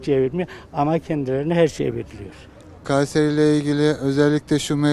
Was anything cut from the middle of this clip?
yes; 1 cut; at 2.7 s

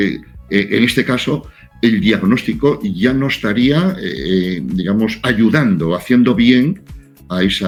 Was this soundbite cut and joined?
no; 0 cuts

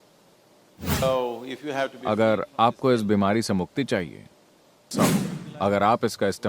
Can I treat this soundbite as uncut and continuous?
no; 2 cuts; at 1.0 s, 4.9 s

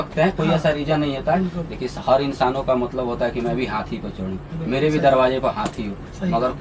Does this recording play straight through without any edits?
yes; 0 cuts

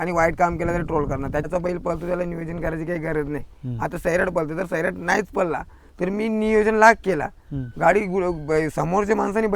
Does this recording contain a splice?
yes; 1 cut; at 1.5 s

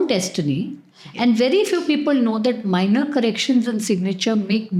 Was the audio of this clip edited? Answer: no; 0 cuts

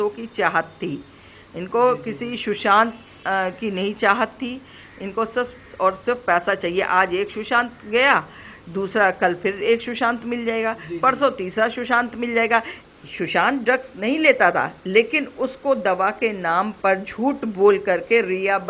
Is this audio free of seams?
no; 1 cut; at 12.8 s

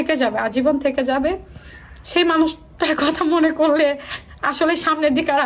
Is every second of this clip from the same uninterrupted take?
yes; 0 cuts

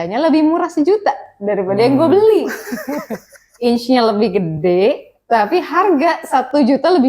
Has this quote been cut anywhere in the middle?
no; 0 cuts

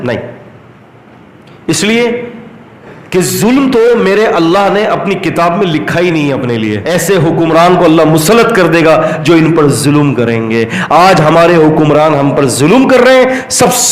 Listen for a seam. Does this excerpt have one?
yes; 1 cut; at 6.8 s

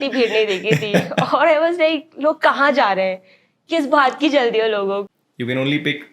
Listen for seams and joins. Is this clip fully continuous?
no; 1 cut; at 5.2 s

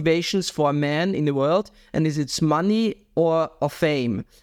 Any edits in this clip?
no; 0 cuts

